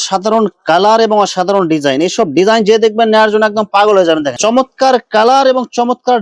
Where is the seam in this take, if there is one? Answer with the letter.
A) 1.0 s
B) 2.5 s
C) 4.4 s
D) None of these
C